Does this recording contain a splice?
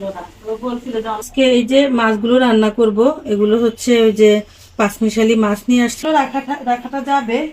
yes; 2 cuts; at 1.3 s, 6.0 s

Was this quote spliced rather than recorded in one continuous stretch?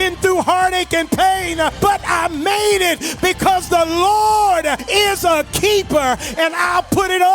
yes; 2 cuts; at 1.7 s, 4.8 s

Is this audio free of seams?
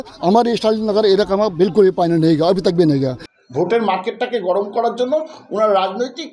no; 1 cut; at 3.2 s

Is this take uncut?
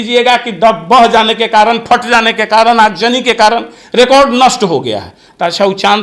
yes; 0 cuts

